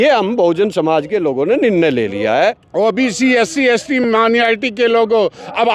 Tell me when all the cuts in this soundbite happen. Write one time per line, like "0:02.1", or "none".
0:02.6